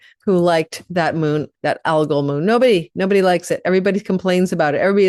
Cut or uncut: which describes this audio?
uncut